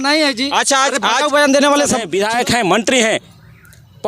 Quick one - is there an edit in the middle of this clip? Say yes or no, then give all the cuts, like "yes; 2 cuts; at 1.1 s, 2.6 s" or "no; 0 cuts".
yes; 1 cut; at 2.1 s